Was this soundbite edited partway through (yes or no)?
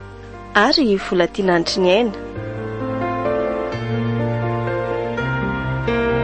yes